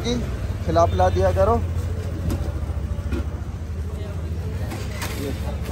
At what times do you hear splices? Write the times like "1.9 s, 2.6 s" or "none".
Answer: none